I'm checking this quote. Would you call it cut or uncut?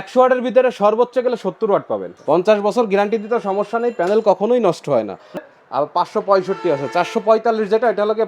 cut